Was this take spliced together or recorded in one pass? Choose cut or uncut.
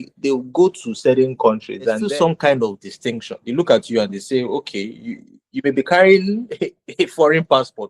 cut